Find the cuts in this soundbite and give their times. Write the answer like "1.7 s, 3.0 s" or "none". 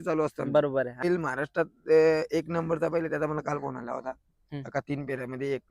1.0 s